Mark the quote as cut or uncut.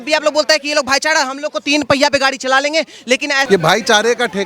cut